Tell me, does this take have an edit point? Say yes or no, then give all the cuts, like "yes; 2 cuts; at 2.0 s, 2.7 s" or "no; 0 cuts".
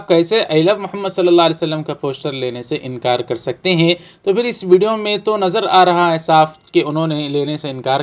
no; 0 cuts